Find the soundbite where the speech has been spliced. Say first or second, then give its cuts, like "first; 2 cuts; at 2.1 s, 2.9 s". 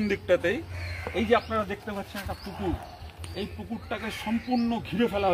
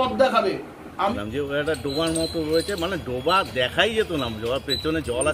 second; 1 cut; at 1.1 s